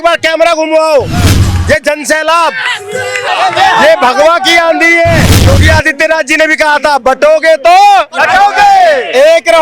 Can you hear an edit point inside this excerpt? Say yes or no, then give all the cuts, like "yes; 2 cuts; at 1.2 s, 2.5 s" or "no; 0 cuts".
yes; 2 cuts; at 3.2 s, 5.5 s